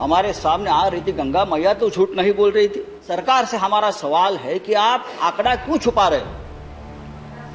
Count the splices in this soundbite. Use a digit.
1